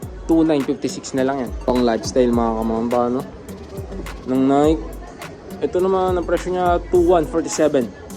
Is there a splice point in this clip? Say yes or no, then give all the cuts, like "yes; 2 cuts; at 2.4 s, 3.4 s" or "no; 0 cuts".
yes; 1 cut; at 1.5 s